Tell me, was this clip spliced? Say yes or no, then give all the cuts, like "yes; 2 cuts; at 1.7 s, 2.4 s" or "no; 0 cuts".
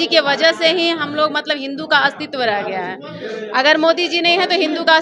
no; 0 cuts